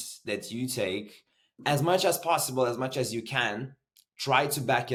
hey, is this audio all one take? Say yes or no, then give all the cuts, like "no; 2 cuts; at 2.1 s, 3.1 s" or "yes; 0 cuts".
yes; 0 cuts